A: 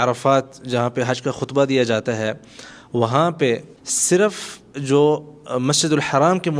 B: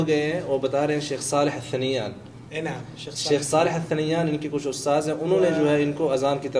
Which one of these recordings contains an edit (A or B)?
A